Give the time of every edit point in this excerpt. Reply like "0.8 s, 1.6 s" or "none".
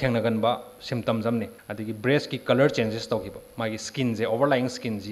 1.6 s